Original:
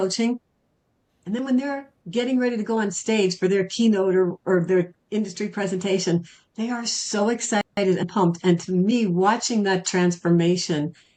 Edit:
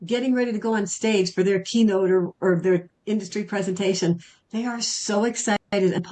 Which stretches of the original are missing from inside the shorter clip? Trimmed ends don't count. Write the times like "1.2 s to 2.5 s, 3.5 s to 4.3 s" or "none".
none